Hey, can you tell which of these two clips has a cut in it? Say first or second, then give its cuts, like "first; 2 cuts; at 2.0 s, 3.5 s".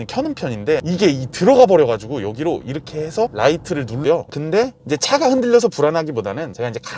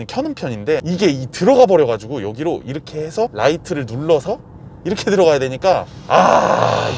first; 1 cut; at 4.0 s